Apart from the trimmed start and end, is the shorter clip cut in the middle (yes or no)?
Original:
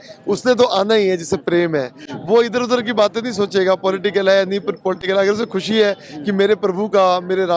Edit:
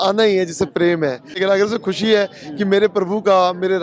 yes